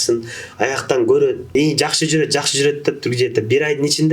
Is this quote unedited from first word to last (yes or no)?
no